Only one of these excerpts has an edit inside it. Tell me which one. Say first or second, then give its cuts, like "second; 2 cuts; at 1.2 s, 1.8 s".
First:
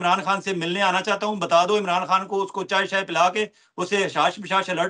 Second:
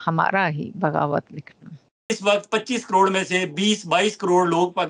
second; 1 cut; at 2.1 s